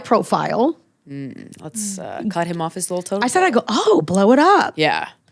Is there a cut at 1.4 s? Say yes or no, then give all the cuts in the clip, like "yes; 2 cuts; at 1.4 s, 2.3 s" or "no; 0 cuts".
no; 0 cuts